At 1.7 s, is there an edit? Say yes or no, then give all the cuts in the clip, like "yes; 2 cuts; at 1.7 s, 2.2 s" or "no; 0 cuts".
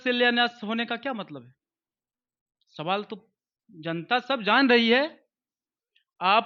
no; 0 cuts